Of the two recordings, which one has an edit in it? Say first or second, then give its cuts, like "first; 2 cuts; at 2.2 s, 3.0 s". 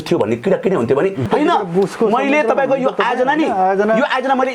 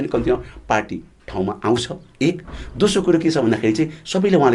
first; 1 cut; at 1.3 s